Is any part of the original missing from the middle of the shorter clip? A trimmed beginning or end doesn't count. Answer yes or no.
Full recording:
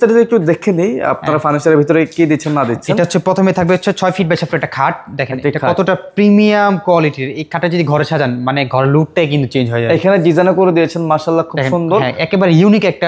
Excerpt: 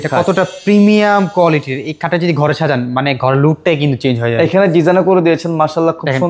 no